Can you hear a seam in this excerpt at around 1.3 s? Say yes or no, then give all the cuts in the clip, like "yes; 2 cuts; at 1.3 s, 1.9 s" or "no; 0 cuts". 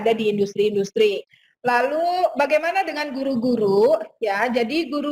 yes; 1 cut; at 1.3 s